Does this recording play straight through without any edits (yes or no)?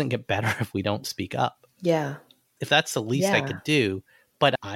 yes